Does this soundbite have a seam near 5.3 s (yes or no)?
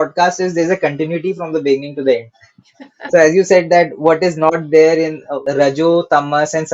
yes